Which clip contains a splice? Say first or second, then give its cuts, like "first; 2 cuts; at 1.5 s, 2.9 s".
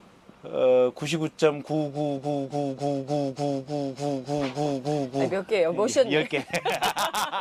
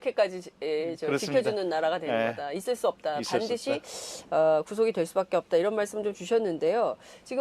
second; 1 cut; at 5.1 s